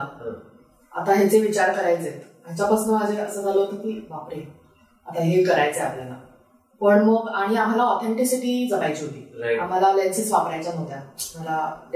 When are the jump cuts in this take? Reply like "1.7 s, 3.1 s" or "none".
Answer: none